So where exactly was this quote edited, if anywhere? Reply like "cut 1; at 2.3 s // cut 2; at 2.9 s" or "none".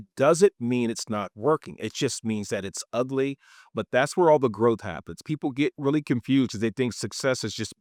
none